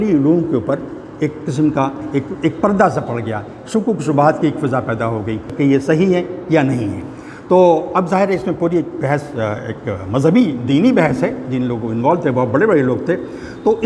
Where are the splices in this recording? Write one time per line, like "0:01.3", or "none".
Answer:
0:05.5